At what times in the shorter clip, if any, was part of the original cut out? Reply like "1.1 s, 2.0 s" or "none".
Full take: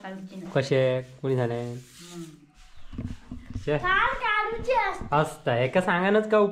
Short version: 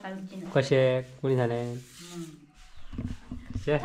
none

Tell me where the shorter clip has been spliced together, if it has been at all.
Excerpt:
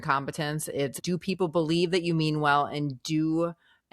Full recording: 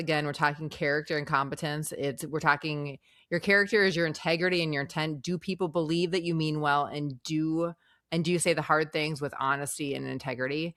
1.0 s

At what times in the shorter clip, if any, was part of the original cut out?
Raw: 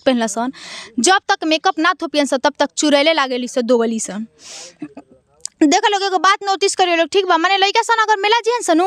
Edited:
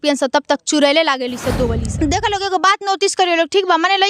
1.8 s

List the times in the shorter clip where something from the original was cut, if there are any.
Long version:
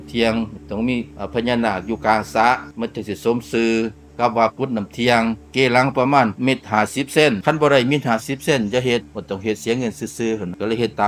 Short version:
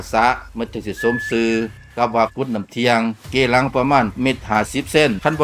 none

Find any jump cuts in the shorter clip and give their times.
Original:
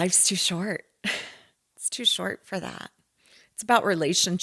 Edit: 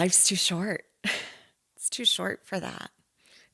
none

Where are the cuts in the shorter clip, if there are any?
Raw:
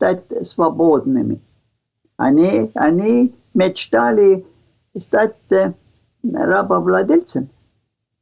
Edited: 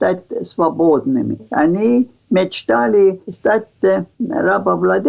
1.5 s, 3.3 s, 4.1 s

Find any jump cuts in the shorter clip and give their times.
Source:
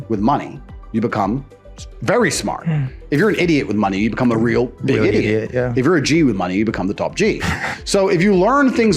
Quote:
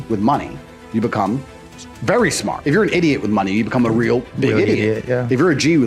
2.6 s

